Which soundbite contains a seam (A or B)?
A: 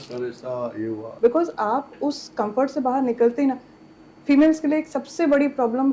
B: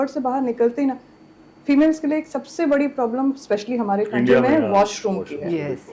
A